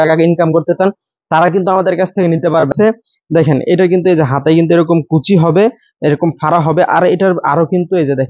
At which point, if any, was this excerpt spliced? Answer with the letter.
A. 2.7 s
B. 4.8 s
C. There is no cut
A